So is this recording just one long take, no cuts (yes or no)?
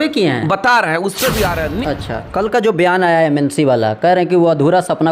no